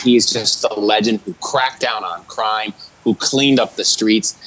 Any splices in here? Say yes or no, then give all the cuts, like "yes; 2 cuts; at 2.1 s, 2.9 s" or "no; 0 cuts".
no; 0 cuts